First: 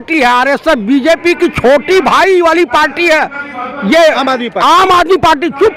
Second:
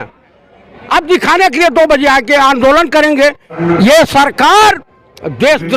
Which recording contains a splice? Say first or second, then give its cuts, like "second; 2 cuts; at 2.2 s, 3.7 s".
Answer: second; 1 cut; at 3.6 s